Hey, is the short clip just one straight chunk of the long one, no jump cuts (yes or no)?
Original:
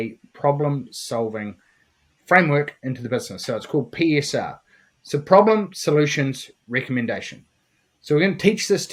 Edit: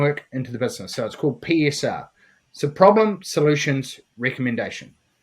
yes